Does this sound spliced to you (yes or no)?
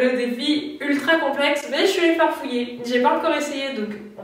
no